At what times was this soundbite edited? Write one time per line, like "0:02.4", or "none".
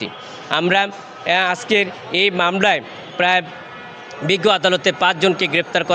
none